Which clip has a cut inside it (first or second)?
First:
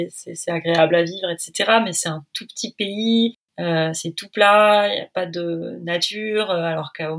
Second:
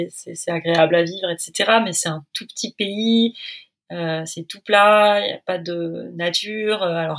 first